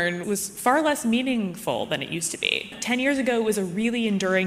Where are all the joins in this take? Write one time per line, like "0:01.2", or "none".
none